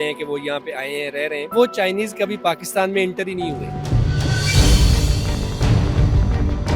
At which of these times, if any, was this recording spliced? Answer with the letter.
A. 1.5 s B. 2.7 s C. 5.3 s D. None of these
A